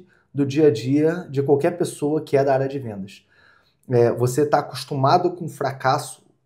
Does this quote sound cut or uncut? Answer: uncut